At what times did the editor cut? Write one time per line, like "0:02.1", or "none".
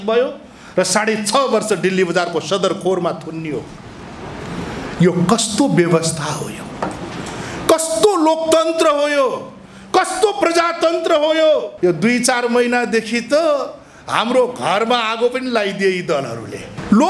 0:11.7